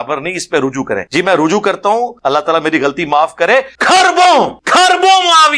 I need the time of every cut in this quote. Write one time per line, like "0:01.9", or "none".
0:01.1
0:02.1
0:03.7
0:04.6